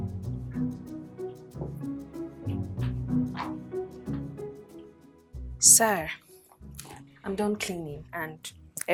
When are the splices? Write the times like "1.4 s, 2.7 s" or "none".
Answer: none